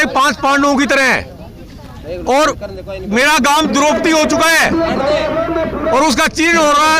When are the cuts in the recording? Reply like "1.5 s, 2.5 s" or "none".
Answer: none